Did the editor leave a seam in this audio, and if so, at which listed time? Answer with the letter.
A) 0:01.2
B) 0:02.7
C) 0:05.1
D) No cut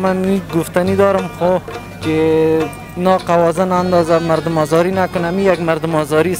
D